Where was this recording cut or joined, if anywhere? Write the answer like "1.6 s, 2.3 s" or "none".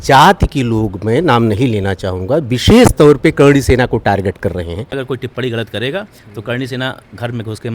4.9 s